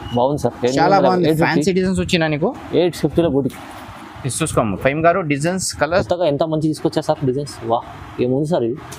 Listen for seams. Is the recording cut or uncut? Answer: cut